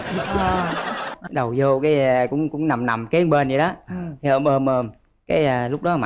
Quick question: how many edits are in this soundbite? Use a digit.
1